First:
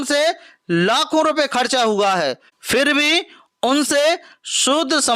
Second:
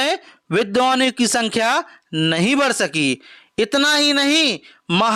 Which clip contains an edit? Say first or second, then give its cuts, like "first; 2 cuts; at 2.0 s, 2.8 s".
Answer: first; 1 cut; at 2.5 s